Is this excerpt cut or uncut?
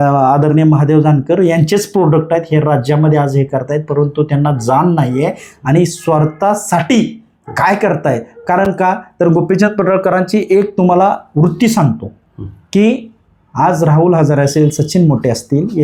uncut